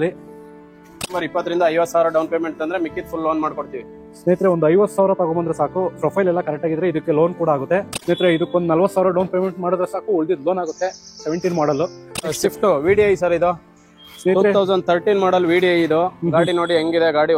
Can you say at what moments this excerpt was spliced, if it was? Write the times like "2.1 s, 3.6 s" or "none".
1.1 s, 7.9 s, 12.3 s